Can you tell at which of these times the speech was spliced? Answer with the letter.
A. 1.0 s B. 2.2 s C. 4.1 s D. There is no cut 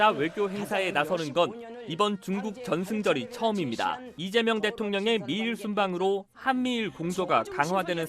C